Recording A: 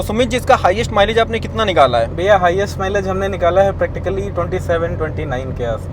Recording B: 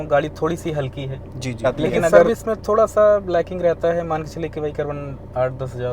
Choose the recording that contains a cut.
B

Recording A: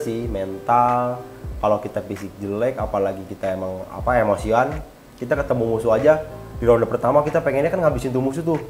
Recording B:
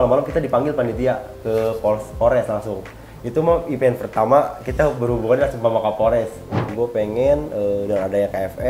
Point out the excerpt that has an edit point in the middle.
B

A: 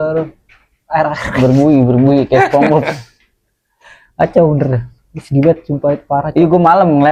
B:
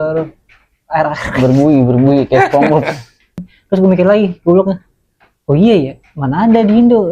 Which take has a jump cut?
B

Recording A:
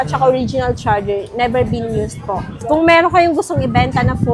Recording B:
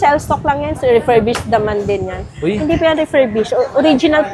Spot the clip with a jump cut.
A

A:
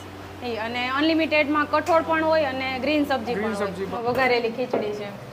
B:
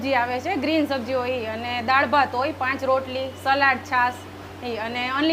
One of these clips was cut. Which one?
A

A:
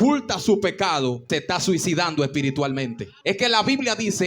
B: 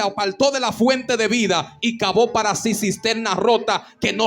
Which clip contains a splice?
A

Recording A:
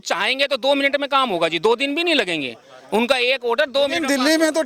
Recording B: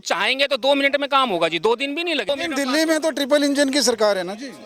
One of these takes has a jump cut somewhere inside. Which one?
B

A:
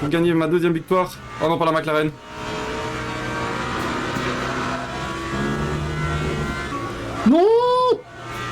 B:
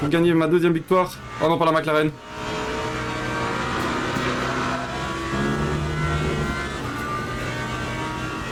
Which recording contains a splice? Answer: A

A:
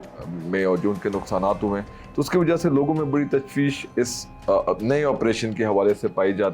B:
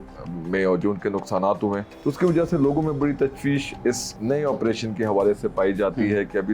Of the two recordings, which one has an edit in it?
B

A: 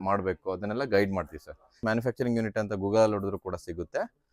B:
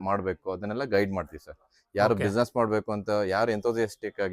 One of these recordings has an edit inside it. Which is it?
A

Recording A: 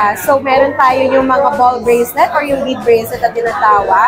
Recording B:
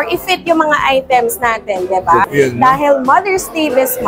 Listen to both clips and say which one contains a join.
B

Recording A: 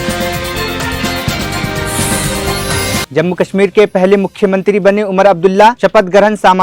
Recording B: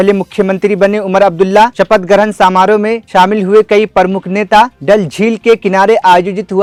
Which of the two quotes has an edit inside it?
A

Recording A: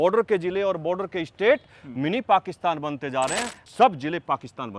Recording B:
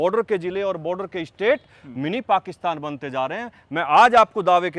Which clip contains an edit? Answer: A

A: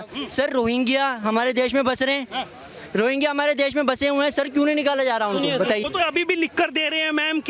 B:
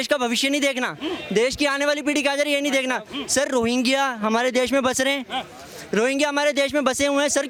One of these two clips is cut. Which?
A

